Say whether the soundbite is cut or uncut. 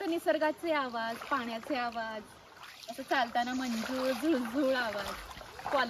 uncut